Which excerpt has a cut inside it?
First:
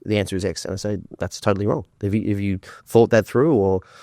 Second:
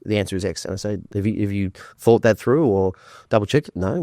second; 1 cut; at 1.1 s

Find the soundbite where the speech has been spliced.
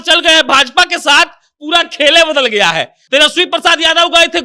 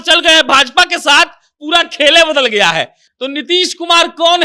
first; 1 cut; at 3.0 s

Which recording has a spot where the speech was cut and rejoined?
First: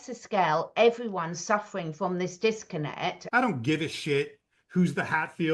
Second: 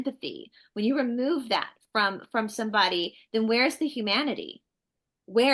first; 1 cut; at 3.2 s

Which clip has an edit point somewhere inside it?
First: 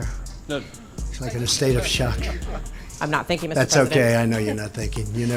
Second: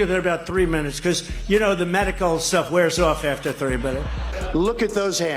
second; 1 cut; at 4.4 s

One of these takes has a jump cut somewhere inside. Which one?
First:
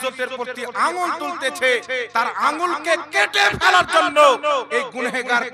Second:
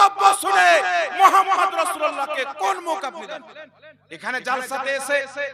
second; 1 cut; at 3.3 s

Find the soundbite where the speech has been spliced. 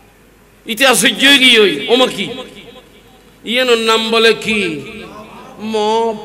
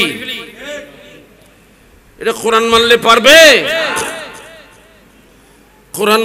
second; 1 cut; at 5.2 s

